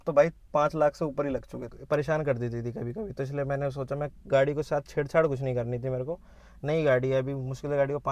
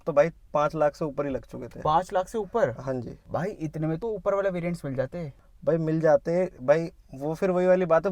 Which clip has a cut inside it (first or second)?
first